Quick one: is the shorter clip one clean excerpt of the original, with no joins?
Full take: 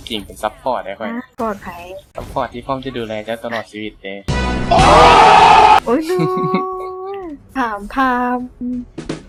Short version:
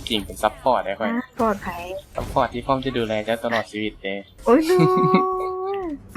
no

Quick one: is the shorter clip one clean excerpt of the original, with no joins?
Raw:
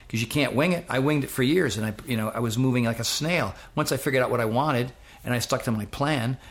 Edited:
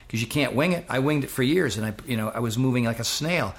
yes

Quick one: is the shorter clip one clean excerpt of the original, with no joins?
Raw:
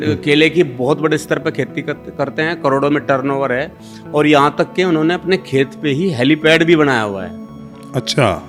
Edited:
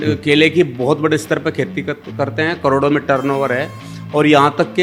yes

